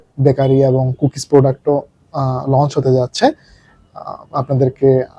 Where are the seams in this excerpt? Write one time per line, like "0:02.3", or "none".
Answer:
none